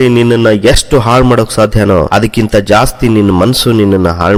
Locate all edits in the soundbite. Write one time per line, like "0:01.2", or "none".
none